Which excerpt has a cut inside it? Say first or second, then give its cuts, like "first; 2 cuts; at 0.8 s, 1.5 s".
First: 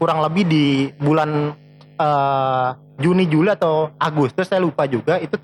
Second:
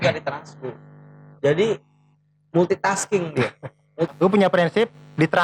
second; 1 cut; at 4.1 s